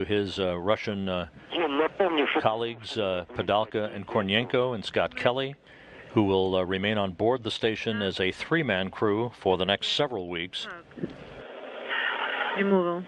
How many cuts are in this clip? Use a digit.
1